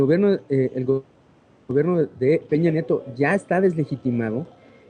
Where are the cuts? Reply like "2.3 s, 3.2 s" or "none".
none